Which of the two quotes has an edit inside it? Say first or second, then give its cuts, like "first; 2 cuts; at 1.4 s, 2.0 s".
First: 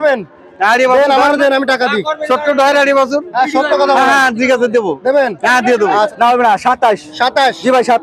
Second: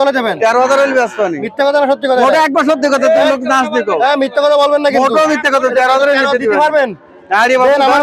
first; 1 cut; at 6.1 s